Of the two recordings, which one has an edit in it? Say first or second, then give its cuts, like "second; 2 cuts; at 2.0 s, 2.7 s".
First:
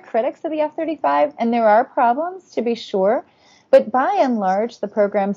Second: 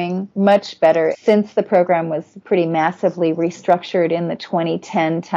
second; 1 cut; at 1.1 s